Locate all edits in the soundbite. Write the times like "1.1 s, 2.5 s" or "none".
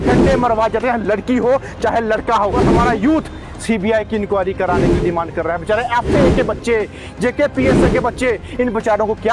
2.6 s